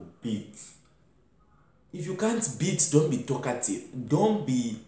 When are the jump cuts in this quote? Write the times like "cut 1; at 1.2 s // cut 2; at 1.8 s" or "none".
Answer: none